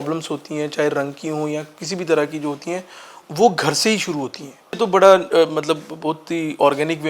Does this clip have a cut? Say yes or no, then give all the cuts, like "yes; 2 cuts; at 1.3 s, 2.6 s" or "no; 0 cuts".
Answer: yes; 1 cut; at 4.8 s